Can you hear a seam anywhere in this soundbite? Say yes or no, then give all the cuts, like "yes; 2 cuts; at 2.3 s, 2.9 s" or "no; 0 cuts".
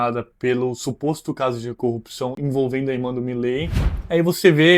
yes; 1 cut; at 3.9 s